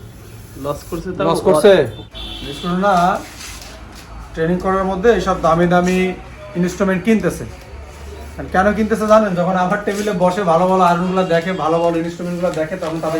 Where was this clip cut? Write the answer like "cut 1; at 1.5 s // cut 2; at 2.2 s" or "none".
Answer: cut 1; at 1.9 s